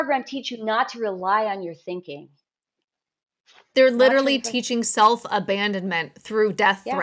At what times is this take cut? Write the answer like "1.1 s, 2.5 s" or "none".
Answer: none